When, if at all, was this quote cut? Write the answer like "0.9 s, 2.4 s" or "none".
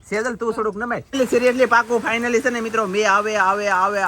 1.0 s